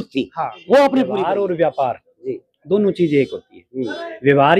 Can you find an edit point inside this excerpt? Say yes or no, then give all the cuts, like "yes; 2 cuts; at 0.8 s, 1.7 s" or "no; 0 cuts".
yes; 1 cut; at 1.2 s